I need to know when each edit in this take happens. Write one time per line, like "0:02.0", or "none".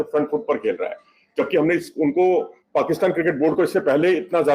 none